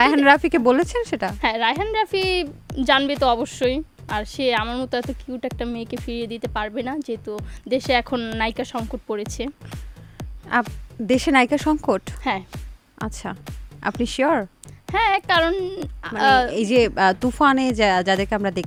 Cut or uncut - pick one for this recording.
uncut